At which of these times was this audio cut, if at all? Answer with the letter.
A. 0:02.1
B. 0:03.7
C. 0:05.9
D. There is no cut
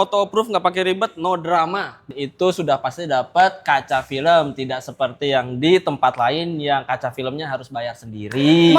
A